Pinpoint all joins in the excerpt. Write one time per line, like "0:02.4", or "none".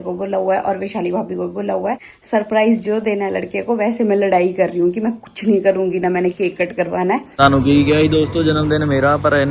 0:02.1
0:07.4

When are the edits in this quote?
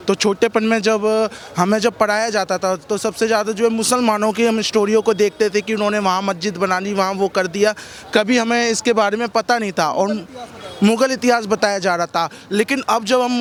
none

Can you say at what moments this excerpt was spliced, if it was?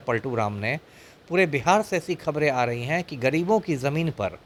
none

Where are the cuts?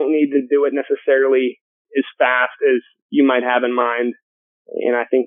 none

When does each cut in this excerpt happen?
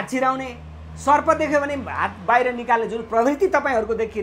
none

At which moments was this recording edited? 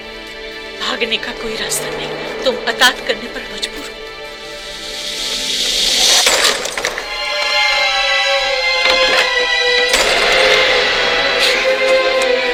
none

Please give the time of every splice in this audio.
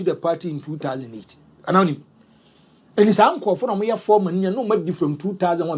none

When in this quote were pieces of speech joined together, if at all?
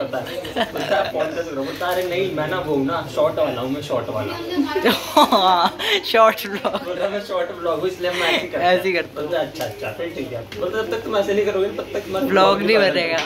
none

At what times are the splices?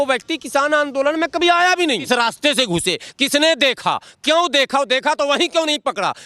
0:02.1

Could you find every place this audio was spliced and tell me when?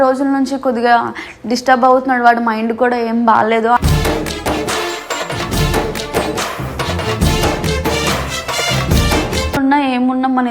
0:09.6

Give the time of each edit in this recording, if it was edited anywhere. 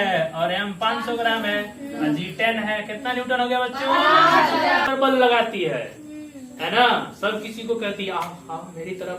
0:04.9

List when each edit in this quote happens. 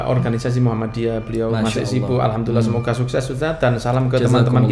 none

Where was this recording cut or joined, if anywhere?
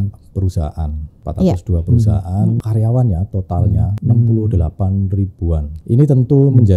0:01.2
0:02.6
0:03.9
0:05.8

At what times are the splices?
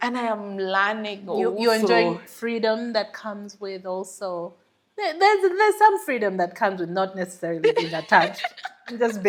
none

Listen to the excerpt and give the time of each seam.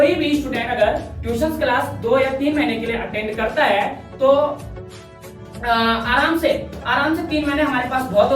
none

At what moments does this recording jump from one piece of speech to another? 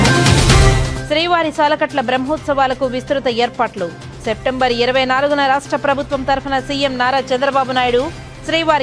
0:01.0

